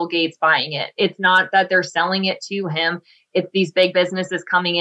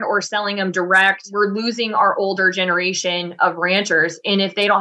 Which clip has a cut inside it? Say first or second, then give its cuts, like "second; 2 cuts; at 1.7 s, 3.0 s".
second; 1 cut; at 1.3 s